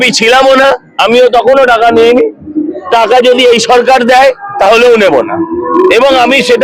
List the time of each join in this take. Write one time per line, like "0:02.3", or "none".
none